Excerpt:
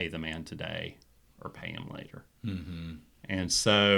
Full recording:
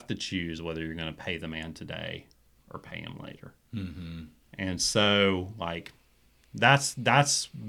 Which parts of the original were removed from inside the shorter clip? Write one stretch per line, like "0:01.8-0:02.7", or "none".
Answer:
none